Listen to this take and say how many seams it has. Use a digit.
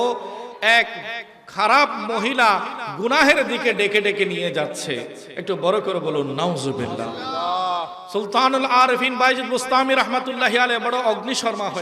1